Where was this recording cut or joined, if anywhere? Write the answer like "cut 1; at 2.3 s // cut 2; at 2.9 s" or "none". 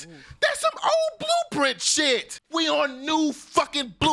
cut 1; at 2.4 s